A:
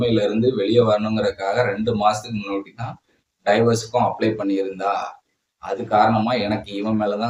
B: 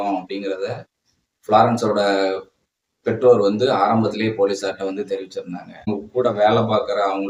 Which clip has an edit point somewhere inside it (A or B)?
B